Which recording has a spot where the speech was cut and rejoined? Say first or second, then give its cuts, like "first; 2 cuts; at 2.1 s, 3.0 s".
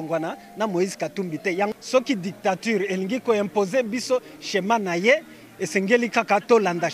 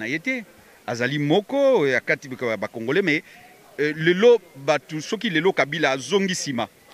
first; 1 cut; at 1.7 s